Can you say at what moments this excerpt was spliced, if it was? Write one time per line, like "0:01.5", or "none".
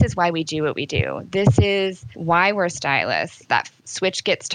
0:02.1
0:03.4